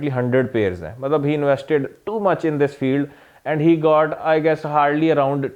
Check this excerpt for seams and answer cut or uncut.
uncut